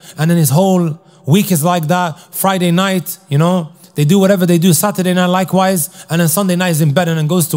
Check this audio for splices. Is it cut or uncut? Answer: uncut